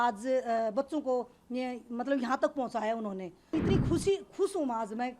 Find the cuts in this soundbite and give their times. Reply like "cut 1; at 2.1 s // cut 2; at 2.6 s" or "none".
cut 1; at 3.5 s